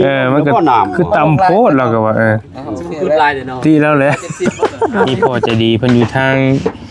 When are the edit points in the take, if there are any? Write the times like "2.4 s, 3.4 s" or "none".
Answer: 5.4 s